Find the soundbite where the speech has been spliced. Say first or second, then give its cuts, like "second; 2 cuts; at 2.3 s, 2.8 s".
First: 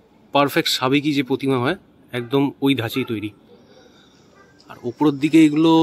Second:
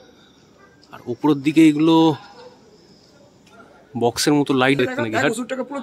second; 1 cut; at 4.8 s